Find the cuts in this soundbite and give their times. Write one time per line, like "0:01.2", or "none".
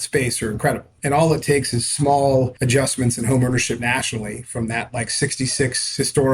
0:00.9
0:02.6